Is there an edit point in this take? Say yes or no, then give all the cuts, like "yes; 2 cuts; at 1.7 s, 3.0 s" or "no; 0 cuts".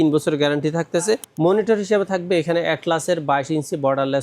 yes; 1 cut; at 1.3 s